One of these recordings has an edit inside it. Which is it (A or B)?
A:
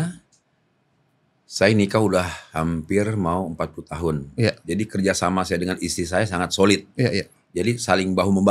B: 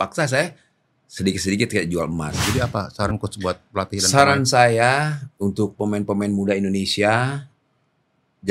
B